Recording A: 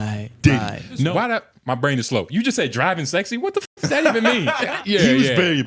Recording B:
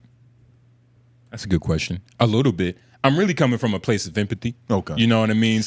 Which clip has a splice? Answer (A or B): A